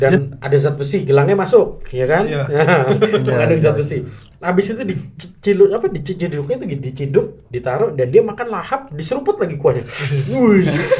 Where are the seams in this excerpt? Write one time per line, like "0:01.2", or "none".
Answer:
none